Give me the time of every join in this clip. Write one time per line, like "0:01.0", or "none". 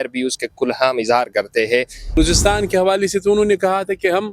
0:02.2